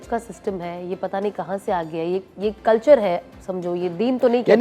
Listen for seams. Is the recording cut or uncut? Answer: uncut